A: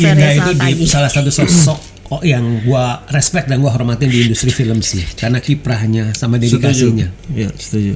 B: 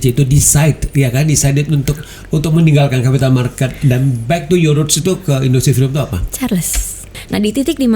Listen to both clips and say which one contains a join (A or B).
B